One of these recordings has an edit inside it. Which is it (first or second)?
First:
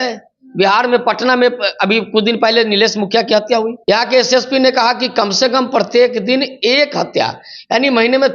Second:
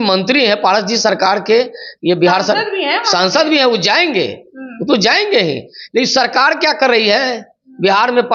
first